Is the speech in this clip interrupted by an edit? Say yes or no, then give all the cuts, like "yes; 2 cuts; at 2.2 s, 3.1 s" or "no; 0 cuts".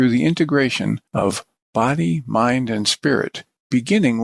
yes; 1 cut; at 1.0 s